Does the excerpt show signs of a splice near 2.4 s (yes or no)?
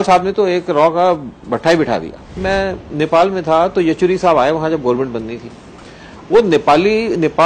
yes